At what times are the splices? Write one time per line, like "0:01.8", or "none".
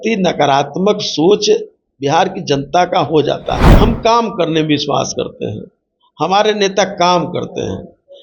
0:03.7